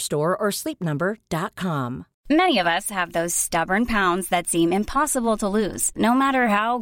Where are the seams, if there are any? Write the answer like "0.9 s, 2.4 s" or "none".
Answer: 2.1 s